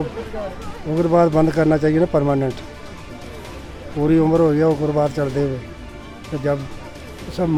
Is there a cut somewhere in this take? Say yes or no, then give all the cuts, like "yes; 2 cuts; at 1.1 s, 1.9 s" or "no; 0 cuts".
no; 0 cuts